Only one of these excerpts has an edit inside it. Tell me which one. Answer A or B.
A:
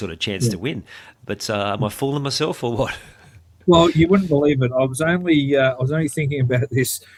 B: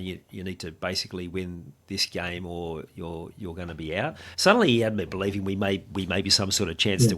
B